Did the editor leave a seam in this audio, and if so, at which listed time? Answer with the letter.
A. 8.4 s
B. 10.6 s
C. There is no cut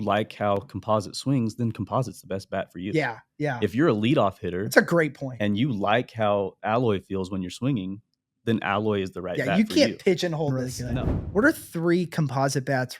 B